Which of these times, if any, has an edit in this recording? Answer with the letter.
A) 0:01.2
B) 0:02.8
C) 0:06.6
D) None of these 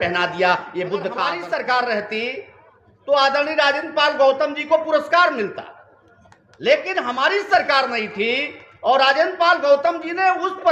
A